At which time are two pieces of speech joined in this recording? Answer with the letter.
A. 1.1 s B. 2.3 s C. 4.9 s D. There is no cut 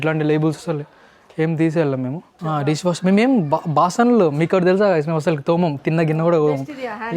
B